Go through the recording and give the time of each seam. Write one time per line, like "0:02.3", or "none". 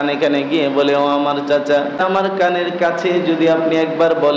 0:02.0